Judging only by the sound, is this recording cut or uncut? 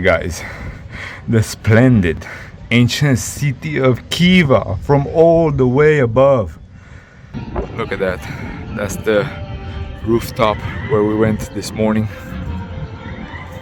cut